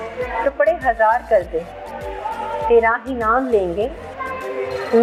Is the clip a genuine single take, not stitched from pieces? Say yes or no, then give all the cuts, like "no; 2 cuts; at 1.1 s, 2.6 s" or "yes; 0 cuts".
yes; 0 cuts